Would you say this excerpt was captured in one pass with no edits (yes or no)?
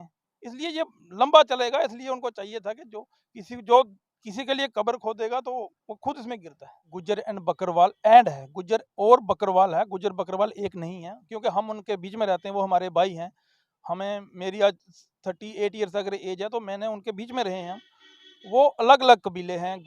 no